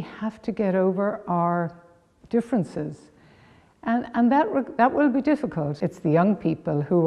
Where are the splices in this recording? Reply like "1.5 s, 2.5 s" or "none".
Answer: 5.7 s